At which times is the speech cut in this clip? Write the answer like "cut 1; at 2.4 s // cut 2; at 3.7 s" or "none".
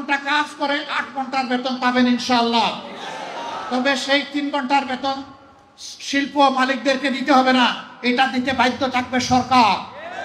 none